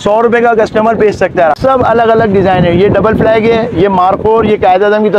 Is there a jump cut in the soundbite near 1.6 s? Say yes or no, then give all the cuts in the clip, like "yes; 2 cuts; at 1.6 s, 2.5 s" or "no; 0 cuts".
yes; 1 cut; at 1.6 s